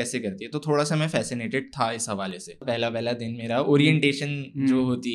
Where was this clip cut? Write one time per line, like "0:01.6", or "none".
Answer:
0:02.6